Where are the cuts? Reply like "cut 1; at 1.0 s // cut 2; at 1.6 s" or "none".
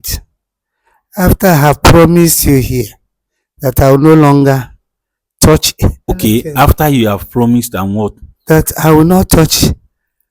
cut 1; at 6.1 s